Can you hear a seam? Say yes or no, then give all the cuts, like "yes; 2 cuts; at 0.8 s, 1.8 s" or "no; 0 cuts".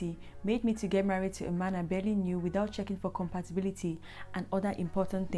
no; 0 cuts